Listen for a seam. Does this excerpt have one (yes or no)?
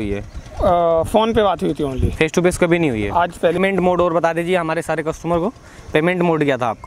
yes